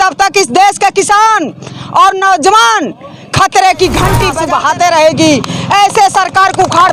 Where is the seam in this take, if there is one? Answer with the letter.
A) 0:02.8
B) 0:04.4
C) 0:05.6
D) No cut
B